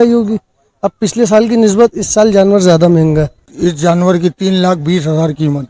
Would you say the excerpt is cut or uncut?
cut